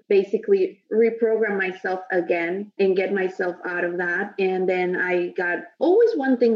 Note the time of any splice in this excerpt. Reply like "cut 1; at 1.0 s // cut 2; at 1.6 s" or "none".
cut 1; at 2.7 s // cut 2; at 5.8 s